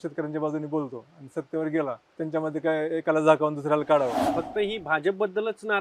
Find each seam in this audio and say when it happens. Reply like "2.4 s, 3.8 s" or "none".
2.1 s, 4.2 s